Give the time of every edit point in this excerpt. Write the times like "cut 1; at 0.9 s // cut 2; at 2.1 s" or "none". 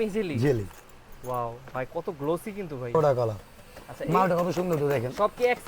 cut 1; at 2.9 s